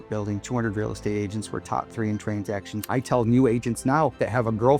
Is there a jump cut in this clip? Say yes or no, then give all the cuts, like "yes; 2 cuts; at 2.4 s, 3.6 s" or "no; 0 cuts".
yes; 1 cut; at 2.9 s